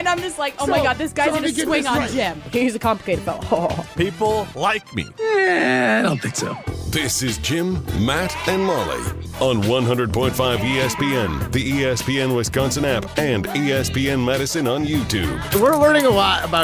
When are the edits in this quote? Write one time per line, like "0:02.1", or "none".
0:15.4